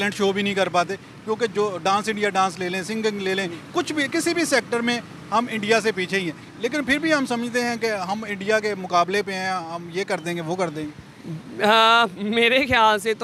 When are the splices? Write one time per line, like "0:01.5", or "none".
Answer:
none